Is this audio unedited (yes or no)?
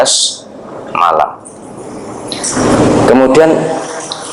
no